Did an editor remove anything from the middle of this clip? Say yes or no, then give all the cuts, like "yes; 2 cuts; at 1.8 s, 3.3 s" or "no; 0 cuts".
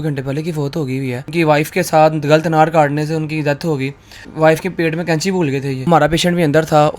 yes; 3 cuts; at 1.3 s, 4.3 s, 5.8 s